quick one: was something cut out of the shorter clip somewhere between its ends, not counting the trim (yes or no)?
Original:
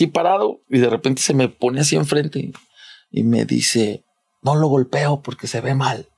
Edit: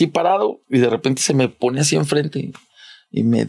no